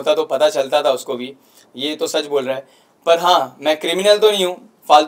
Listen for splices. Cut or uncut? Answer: uncut